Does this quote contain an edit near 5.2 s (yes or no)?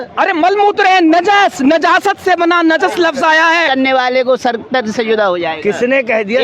no